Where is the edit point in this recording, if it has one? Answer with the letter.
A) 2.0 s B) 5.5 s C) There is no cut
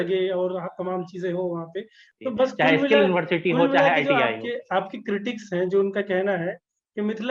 A